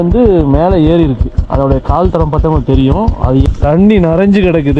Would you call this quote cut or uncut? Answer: cut